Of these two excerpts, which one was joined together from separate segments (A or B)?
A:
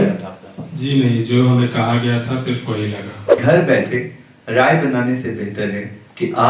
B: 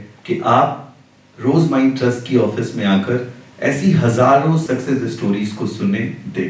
A